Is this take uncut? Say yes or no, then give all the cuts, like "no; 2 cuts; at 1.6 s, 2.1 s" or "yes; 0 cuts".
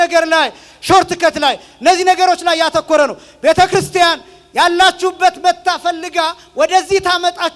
yes; 0 cuts